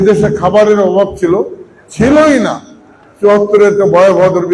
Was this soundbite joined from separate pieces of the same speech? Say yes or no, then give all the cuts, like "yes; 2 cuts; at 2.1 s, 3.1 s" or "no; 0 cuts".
no; 0 cuts